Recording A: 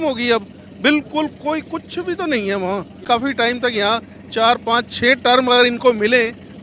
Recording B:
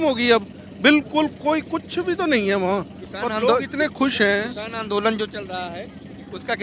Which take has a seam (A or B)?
A